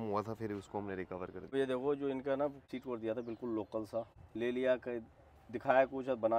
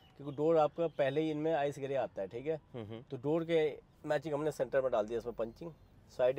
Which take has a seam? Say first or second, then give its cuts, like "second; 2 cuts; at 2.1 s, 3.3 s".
first; 3 cuts; at 1.5 s, 2.6 s, 4.2 s